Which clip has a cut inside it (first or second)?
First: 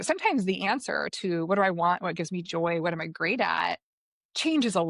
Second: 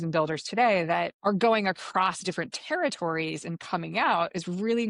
second